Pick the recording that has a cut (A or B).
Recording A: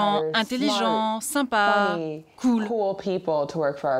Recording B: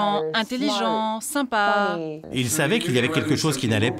B